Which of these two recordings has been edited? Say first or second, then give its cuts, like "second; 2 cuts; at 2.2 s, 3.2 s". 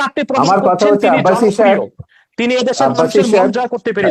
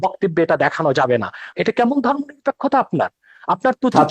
second; 1 cut; at 1.5 s